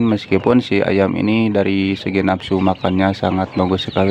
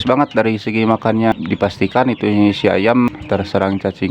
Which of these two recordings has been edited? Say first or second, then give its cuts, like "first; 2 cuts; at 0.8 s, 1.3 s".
second; 2 cuts; at 1.4 s, 3.2 s